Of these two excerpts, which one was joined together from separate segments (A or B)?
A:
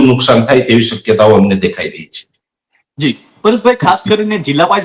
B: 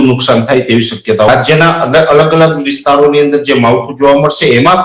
B